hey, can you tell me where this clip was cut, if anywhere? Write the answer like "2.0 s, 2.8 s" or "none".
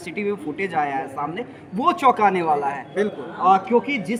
none

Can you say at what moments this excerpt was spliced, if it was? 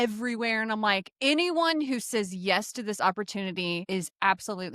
3.8 s

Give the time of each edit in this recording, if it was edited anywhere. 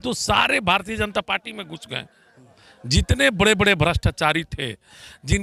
none

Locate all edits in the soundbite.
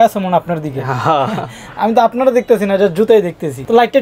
none

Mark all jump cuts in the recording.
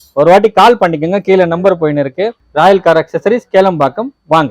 2.4 s

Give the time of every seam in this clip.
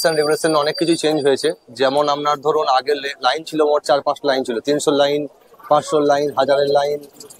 none

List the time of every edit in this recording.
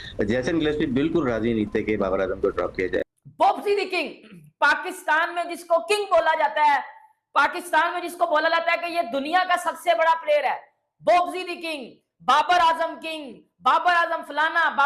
3.0 s

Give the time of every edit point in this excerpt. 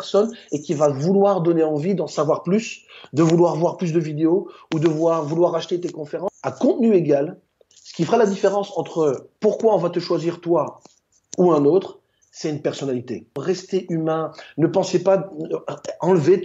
6.2 s, 13.4 s

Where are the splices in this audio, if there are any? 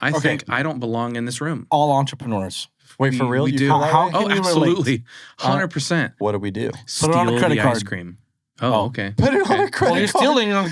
6.2 s

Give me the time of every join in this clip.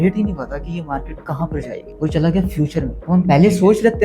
1.9 s, 3.0 s

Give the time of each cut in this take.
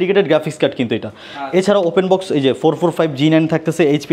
none

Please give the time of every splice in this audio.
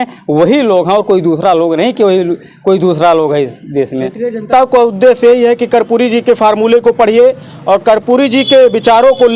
4.5 s

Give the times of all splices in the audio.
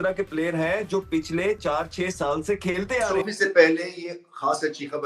3.1 s

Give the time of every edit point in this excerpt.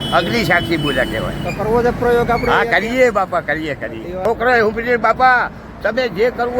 4.2 s

